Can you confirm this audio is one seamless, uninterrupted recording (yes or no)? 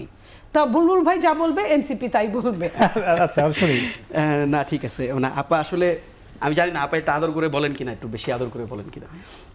yes